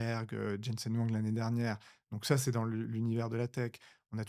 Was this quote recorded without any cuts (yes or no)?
yes